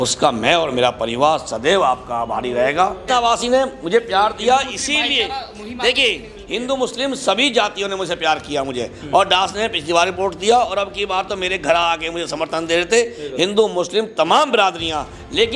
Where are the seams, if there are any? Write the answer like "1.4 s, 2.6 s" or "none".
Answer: 3.0 s